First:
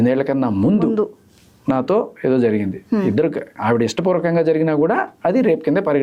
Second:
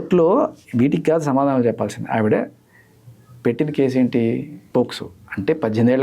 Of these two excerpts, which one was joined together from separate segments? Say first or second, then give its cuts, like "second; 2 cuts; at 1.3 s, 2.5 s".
second; 1 cut; at 4.5 s